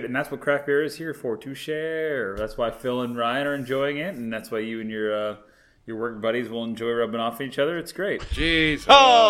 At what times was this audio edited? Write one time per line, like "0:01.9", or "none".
none